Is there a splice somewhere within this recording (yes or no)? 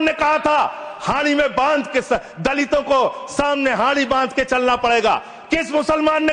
no